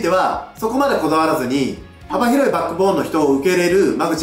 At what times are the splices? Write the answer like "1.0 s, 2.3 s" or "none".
none